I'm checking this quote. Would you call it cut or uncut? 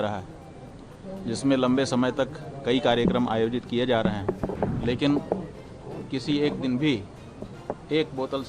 cut